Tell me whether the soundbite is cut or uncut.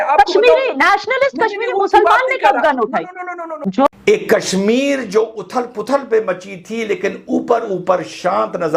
cut